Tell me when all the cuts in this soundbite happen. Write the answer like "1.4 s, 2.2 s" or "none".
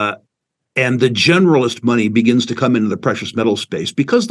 none